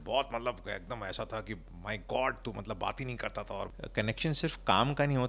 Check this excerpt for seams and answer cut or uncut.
cut